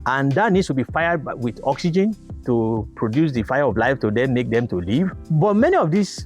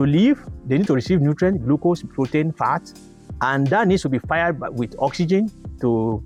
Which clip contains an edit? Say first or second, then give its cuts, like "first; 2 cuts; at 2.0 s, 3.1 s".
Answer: first; 1 cut; at 5.2 s